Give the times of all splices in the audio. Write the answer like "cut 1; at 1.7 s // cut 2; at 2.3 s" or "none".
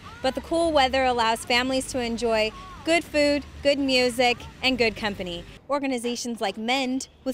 cut 1; at 5.5 s